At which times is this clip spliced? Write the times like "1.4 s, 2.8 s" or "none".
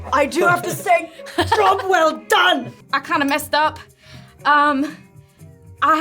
2.8 s

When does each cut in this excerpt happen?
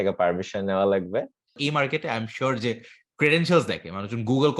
1.6 s

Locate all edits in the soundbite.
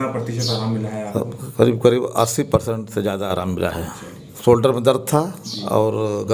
4.2 s

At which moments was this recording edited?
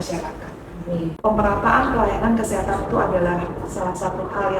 1.2 s

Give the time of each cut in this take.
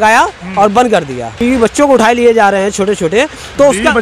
1.4 s

